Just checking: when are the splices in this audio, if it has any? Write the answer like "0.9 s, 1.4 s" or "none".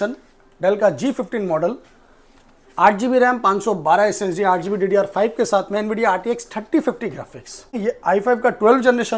7.8 s